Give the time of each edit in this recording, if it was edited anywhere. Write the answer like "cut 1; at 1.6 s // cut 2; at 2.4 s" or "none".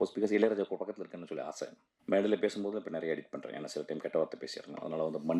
cut 1; at 1.9 s